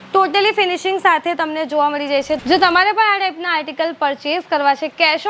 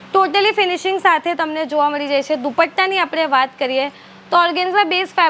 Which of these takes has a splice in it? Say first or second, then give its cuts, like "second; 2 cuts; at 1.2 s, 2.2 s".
first; 1 cut; at 2.4 s